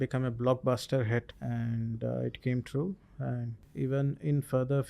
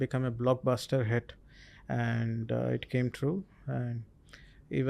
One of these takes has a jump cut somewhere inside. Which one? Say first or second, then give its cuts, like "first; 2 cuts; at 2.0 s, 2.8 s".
first; 2 cuts; at 1.4 s, 3.6 s